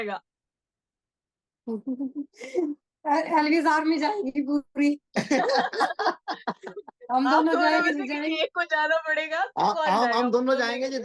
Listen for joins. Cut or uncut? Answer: uncut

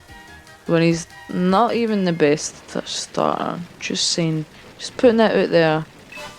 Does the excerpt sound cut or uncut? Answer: uncut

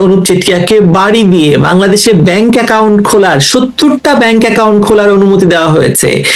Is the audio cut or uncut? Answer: uncut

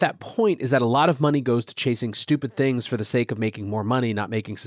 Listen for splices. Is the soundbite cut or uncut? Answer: uncut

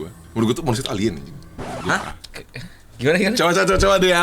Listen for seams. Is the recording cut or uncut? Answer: uncut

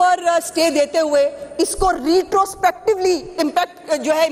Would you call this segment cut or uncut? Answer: uncut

